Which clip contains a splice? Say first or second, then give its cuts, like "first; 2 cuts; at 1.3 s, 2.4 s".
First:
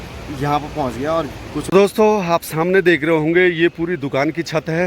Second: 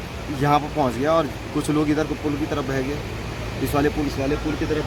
first; 1 cut; at 1.7 s